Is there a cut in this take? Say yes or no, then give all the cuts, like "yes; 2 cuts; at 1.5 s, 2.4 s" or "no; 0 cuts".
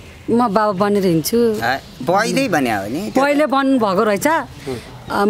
no; 0 cuts